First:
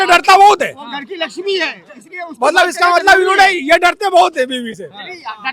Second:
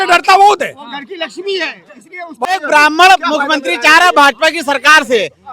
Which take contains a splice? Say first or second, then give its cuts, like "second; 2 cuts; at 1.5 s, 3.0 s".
second; 1 cut; at 2.5 s